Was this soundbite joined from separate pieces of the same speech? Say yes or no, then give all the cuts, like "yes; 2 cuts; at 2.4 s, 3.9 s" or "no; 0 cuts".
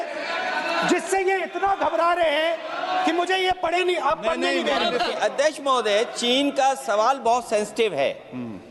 yes; 1 cut; at 5.1 s